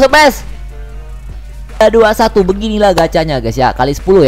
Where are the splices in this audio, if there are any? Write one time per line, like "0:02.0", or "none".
0:01.8